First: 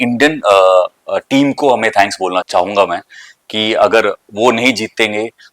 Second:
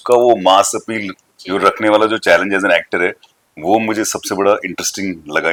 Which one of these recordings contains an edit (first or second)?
first